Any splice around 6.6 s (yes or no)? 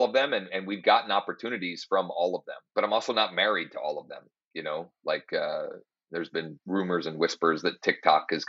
yes